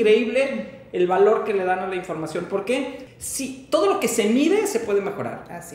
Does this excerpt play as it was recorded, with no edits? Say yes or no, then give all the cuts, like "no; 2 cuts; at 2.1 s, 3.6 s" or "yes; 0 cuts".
no; 1 cut; at 3.0 s